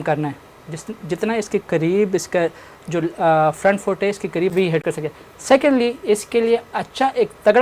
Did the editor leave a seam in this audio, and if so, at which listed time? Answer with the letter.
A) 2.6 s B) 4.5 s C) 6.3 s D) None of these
B